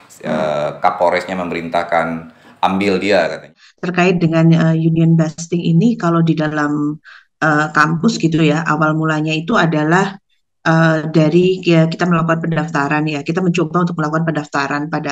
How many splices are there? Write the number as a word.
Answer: one